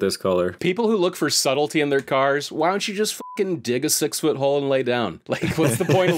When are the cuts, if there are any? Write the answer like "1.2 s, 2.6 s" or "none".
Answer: none